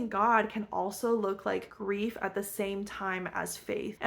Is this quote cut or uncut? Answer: uncut